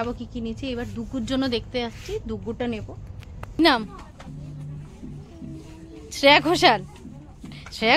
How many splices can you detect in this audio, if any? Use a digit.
1